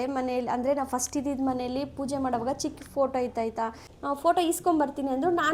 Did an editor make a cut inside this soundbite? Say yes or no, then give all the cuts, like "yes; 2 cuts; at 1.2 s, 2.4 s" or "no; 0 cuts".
yes; 1 cut; at 3.9 s